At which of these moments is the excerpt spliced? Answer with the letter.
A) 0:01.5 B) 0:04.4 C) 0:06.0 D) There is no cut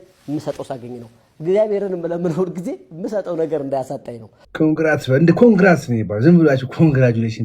B